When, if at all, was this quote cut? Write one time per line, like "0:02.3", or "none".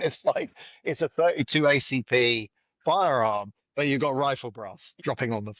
none